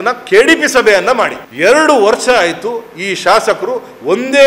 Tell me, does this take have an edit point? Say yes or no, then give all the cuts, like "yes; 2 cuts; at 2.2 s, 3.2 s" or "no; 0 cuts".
yes; 1 cut; at 1.4 s